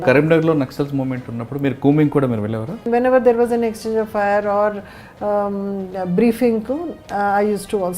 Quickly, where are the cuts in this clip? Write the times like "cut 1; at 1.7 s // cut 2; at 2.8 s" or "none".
cut 1; at 2.9 s